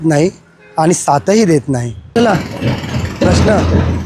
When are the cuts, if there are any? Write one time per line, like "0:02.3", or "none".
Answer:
0:02.2